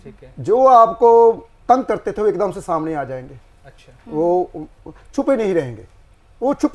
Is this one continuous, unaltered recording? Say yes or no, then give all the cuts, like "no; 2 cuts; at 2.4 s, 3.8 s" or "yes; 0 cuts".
yes; 0 cuts